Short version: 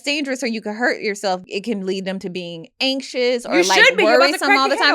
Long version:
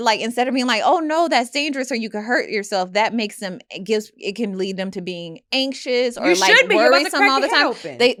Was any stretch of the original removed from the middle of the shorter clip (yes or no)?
yes